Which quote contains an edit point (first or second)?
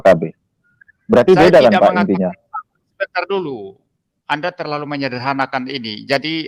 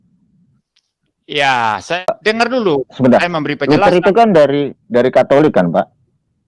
second